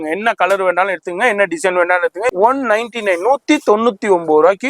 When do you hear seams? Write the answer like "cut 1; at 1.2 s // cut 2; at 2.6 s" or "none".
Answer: cut 1; at 2.3 s